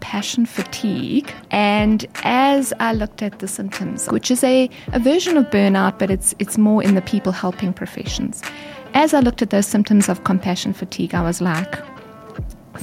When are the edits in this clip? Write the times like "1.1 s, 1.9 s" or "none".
1.4 s, 4.1 s